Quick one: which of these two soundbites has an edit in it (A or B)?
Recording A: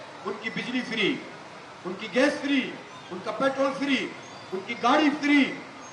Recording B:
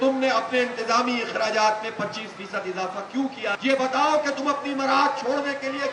B